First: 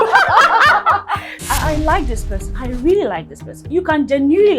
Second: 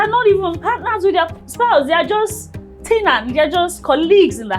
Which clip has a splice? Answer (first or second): first